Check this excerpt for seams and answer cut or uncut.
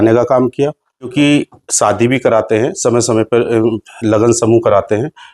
cut